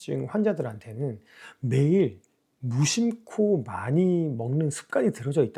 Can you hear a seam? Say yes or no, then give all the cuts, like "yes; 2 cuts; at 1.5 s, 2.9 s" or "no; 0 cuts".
no; 0 cuts